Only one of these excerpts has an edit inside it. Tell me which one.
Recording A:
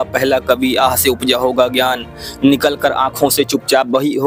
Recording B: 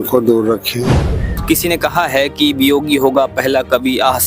B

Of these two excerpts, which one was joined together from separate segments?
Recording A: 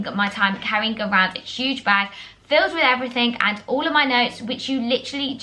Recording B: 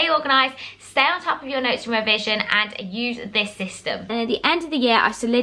B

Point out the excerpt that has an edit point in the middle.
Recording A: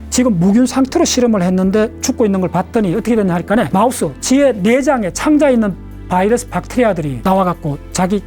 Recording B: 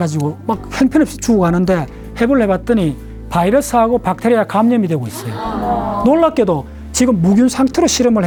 A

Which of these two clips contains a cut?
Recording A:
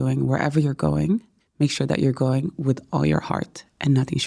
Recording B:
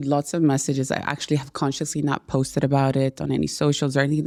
A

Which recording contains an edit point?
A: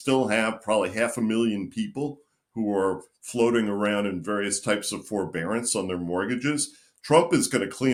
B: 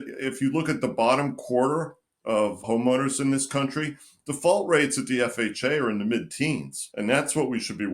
B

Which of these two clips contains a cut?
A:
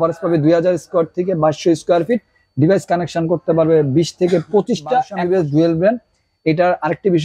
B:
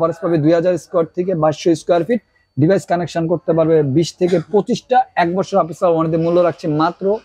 A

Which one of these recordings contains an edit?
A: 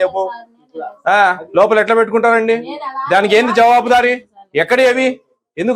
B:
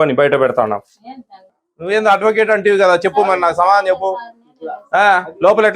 B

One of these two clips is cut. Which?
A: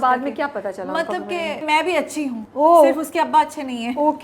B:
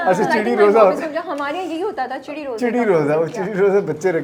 A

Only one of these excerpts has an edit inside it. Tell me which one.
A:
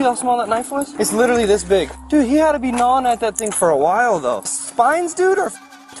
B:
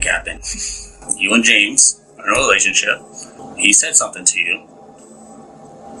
B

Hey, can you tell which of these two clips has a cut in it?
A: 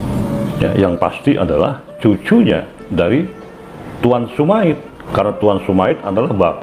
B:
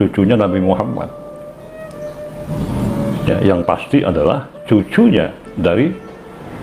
A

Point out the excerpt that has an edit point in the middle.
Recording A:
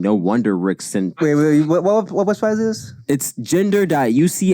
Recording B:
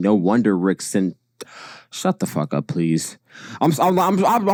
A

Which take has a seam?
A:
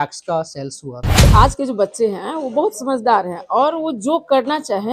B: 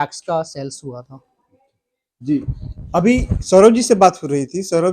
A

